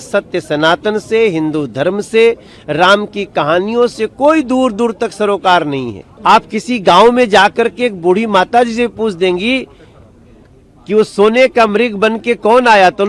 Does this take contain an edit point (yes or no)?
yes